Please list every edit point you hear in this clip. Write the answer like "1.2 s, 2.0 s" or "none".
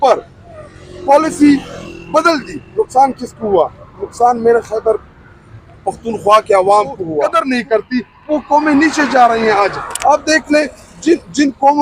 7.2 s